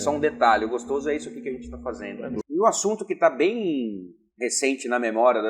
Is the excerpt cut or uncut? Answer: cut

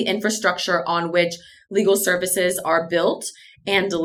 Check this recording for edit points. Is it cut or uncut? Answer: uncut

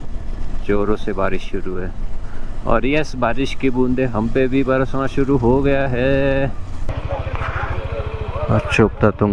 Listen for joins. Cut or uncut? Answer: cut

